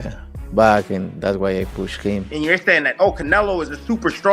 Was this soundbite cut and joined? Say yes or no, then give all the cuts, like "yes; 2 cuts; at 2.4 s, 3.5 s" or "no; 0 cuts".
yes; 1 cut; at 2.3 s